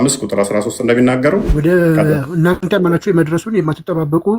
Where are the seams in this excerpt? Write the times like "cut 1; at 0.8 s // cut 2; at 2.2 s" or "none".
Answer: cut 1; at 1.5 s // cut 2; at 2.6 s